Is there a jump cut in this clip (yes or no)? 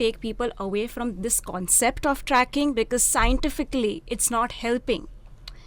no